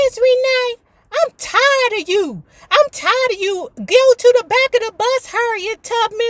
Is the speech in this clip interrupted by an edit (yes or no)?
no